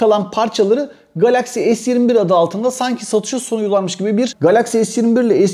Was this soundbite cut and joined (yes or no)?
yes